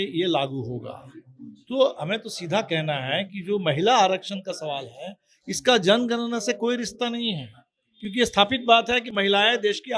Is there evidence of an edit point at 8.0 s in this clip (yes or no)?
no